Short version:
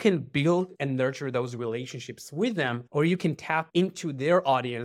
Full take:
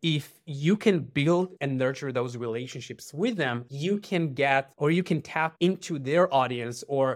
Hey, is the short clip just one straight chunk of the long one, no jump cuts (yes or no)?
no